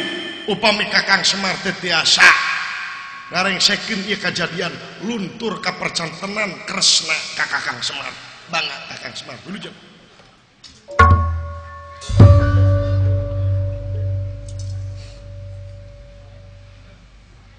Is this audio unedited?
yes; 0 cuts

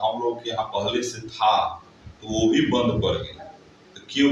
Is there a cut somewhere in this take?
no; 0 cuts

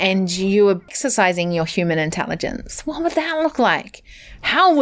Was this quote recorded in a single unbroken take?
no; 1 cut; at 0.9 s

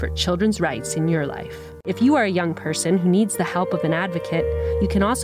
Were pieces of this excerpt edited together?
yes; 1 cut; at 1.9 s

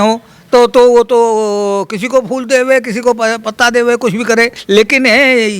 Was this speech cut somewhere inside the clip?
yes; 1 cut; at 4.6 s

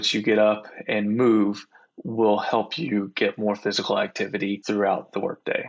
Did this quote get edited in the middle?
yes; 1 cut; at 4.6 s

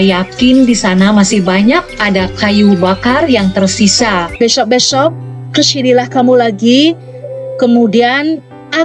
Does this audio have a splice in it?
yes; 1 cut; at 4.3 s

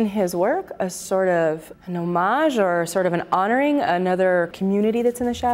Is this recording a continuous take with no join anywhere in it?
no; 2 cuts; at 1.7 s, 4.5 s

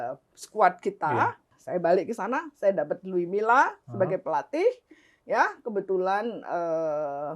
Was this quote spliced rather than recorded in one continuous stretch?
yes; 1 cut; at 1.5 s

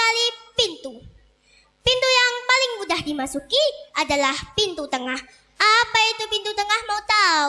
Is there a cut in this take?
no; 0 cuts

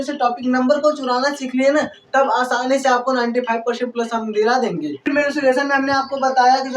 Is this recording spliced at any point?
yes; 1 cut; at 5.1 s

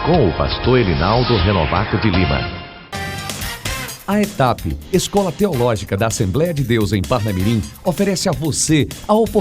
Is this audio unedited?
yes; 0 cuts

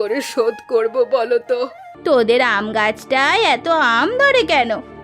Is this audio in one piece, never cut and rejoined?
no; 1 cut; at 1.9 s

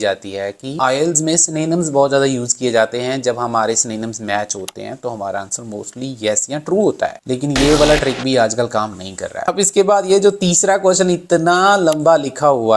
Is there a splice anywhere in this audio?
yes; 1 cut; at 9.4 s

